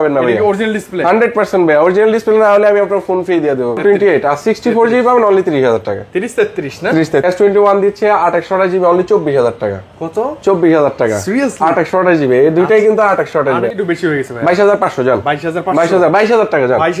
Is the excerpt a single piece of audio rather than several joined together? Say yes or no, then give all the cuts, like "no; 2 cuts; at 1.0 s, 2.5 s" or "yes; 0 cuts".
no; 3 cuts; at 3.8 s, 7.2 s, 13.7 s